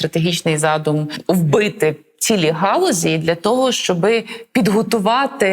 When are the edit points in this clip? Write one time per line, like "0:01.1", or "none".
0:01.1